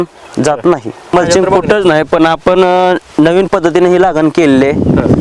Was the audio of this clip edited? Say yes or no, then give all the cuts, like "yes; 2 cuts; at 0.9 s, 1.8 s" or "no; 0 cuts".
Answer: yes; 1 cut; at 1.1 s